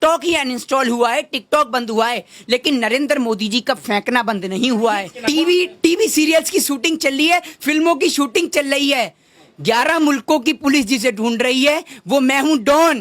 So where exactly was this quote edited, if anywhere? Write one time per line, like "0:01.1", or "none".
0:05.1